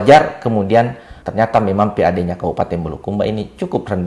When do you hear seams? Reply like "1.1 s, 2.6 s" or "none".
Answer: 1.0 s